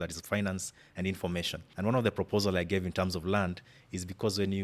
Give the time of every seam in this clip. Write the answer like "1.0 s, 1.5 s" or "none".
1.6 s